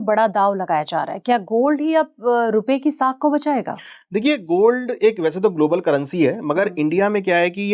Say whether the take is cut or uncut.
uncut